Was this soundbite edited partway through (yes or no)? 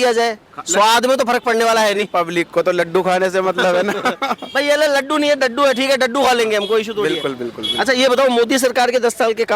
no